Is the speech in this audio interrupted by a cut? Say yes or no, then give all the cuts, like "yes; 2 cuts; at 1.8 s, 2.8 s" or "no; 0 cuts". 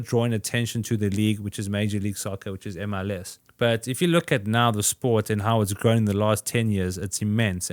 yes; 1 cut; at 3.4 s